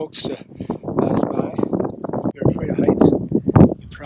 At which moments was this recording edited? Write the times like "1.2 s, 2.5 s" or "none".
2.4 s